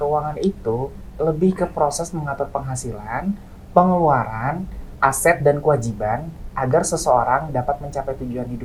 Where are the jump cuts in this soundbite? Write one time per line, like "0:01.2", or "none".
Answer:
none